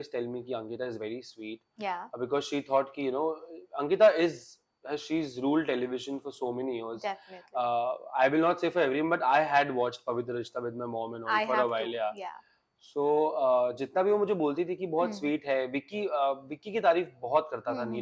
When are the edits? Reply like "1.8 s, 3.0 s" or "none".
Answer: none